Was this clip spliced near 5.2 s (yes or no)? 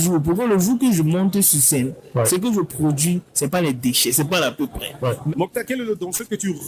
yes